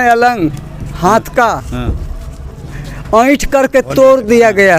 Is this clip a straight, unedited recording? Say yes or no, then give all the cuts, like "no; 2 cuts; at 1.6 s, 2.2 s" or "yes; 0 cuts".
yes; 0 cuts